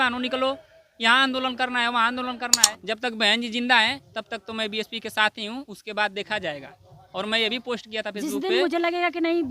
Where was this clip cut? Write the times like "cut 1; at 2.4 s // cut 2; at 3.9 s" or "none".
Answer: cut 1; at 2.7 s

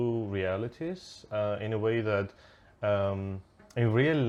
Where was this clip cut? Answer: none

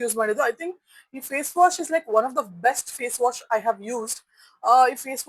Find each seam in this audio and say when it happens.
none

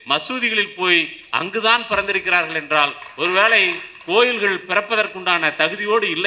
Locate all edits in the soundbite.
none

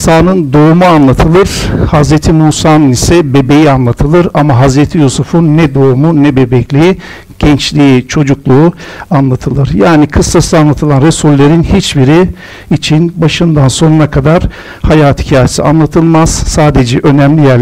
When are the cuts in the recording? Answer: none

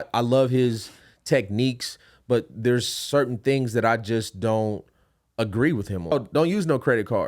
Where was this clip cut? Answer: cut 1; at 6.1 s

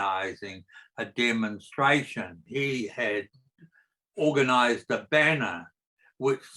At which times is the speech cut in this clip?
cut 1; at 2.4 s

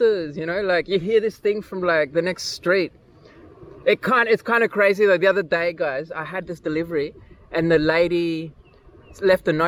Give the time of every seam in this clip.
none

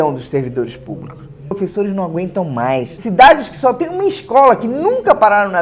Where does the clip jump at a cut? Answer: cut 1; at 1.5 s // cut 2; at 2.9 s

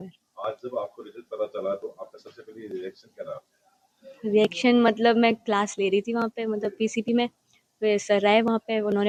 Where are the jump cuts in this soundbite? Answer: none

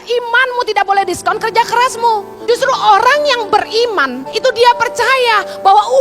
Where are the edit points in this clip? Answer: cut 1; at 2.3 s // cut 2; at 4.2 s

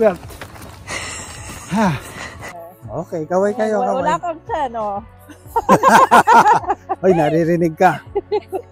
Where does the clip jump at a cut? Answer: cut 1; at 2.6 s

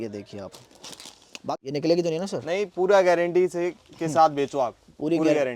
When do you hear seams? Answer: cut 1; at 1.5 s

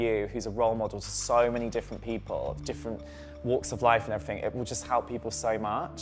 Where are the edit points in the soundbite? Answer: none

